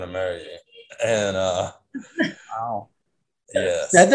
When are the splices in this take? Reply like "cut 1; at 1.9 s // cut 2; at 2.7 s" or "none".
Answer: none